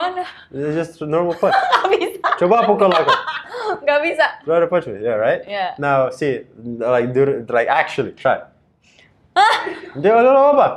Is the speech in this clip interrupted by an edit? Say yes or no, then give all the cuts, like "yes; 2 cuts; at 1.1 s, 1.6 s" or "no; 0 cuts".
no; 0 cuts